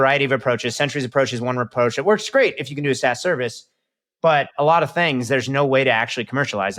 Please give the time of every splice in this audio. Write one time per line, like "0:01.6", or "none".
none